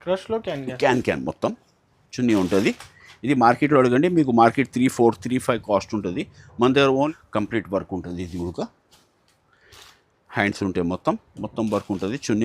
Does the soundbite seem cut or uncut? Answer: cut